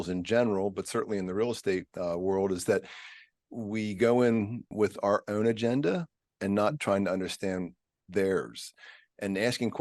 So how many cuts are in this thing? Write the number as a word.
one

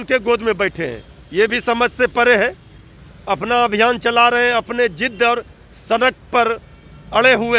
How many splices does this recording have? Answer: one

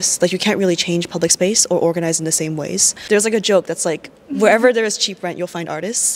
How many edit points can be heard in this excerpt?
one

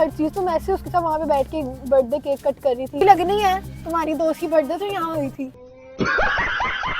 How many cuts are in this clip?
one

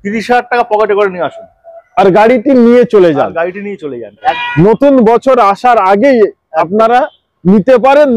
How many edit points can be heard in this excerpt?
one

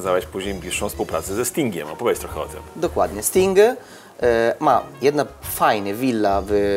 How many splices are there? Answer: zero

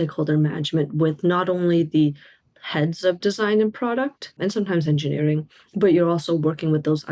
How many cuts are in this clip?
one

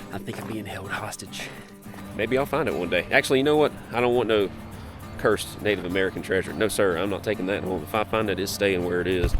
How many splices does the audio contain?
one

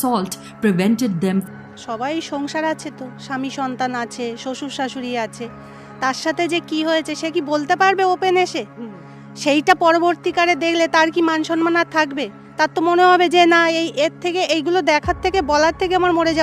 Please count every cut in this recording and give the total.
one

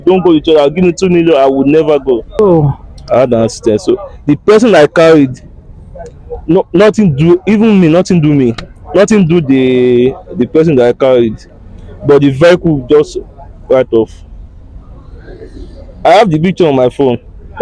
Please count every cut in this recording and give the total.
one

